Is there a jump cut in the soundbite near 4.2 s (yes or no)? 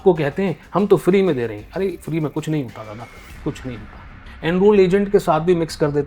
yes